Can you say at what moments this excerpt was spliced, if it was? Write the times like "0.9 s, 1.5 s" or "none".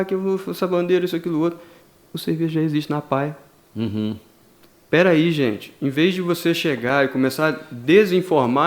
none